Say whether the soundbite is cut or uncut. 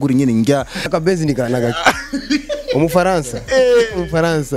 cut